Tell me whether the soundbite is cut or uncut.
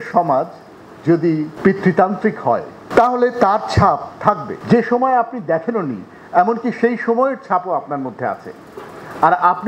cut